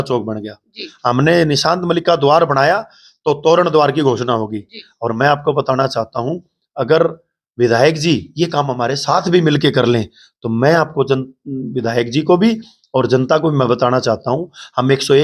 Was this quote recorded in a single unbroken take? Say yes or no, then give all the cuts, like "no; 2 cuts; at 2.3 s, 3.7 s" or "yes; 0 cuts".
yes; 0 cuts